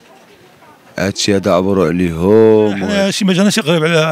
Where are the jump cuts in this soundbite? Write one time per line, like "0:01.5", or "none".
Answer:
0:02.9